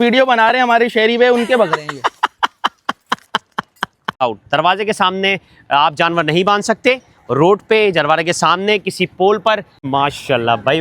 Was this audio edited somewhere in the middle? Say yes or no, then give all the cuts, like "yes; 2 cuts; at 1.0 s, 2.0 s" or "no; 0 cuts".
yes; 2 cuts; at 4.1 s, 9.8 s